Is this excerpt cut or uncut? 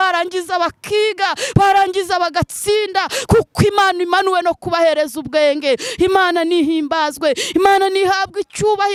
uncut